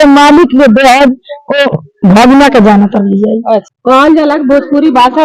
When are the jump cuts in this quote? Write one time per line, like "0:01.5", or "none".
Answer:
0:03.7